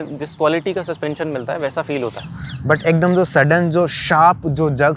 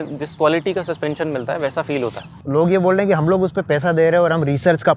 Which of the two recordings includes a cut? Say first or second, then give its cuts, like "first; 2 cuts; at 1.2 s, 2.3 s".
second; 1 cut; at 2.4 s